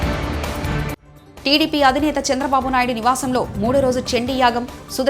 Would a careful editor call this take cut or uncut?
cut